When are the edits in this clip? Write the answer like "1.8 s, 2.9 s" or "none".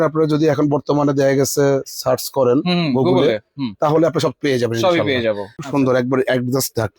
5.6 s

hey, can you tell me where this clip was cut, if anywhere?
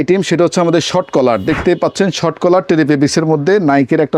none

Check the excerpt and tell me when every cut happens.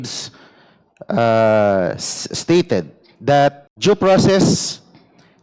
3.7 s

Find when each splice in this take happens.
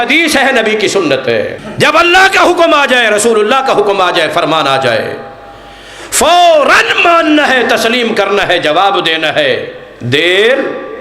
1.6 s

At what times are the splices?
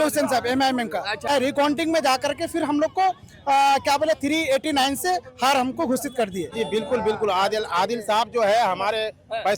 1.3 s, 6.5 s

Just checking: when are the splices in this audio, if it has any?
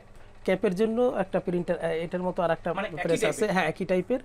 none

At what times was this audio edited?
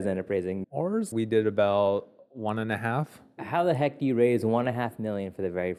0.7 s, 3.4 s

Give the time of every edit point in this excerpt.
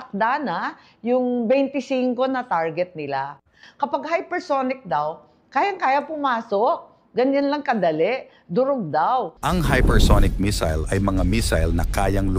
none

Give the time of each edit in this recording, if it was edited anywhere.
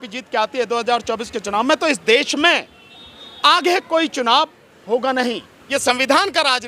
5.5 s

